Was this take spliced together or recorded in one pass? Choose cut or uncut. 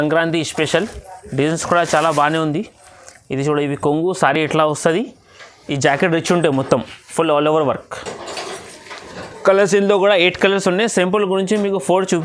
uncut